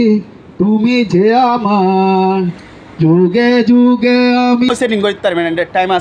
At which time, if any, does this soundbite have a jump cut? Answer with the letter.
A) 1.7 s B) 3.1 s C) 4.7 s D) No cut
C